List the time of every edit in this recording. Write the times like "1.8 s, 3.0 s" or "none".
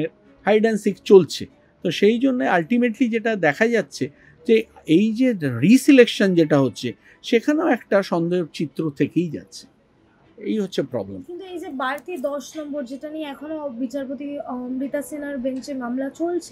none